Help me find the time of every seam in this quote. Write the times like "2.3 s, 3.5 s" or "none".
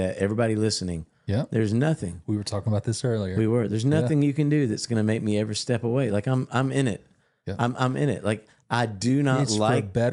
none